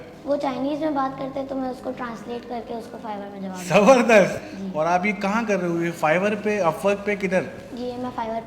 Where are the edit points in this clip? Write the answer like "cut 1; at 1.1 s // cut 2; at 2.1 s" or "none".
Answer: cut 1; at 4.4 s